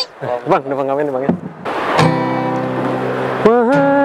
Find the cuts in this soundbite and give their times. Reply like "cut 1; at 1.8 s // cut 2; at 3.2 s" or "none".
cut 1; at 1.7 s